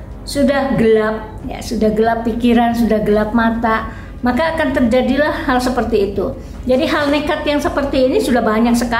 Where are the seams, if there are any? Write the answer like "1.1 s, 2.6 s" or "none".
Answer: none